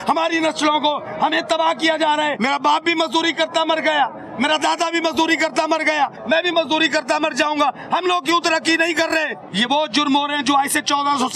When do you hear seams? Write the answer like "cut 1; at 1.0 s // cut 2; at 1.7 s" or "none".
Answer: cut 1; at 2.4 s // cut 2; at 6.2 s // cut 3; at 9.4 s